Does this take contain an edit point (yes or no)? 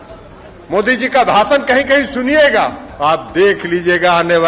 yes